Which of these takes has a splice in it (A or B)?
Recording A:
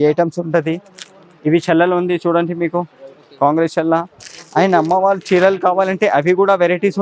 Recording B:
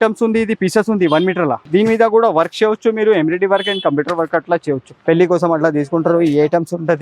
B